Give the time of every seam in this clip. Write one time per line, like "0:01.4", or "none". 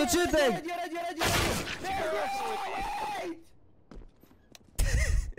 none